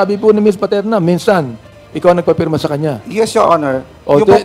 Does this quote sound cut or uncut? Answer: uncut